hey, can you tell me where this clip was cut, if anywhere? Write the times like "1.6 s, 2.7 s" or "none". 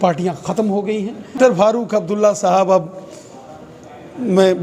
1.4 s